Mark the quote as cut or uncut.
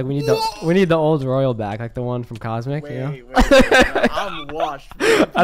uncut